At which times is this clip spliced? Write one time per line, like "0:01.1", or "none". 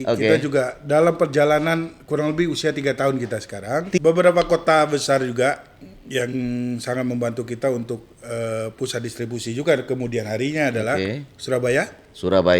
0:04.0